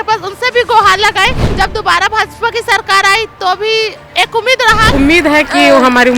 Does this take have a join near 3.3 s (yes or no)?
no